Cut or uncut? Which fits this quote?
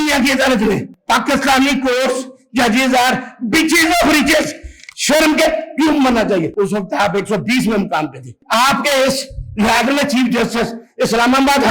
cut